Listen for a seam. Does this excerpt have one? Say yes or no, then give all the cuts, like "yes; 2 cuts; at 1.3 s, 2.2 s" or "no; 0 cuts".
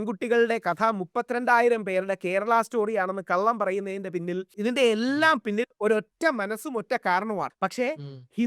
yes; 2 cuts; at 4.5 s, 7.6 s